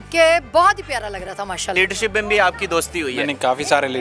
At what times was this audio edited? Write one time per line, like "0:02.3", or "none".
0:01.7